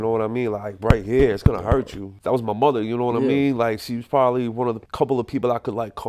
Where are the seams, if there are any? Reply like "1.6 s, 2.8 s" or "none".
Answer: 2.1 s